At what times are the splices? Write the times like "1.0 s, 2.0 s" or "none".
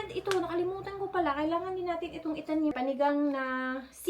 2.7 s